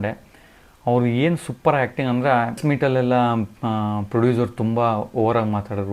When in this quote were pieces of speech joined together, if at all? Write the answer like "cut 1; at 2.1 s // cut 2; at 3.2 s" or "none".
cut 1; at 2.6 s